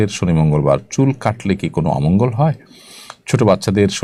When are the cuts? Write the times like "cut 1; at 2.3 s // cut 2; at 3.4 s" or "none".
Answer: none